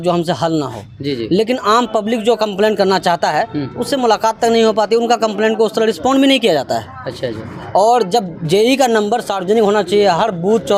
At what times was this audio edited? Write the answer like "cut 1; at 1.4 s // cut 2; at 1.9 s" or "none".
none